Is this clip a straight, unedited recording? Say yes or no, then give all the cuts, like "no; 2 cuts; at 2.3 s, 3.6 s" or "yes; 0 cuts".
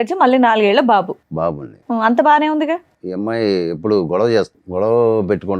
no; 2 cuts; at 3.0 s, 4.6 s